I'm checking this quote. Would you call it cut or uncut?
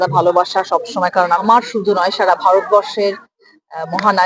cut